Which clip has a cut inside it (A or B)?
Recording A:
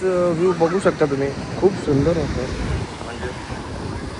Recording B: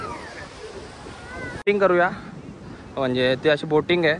B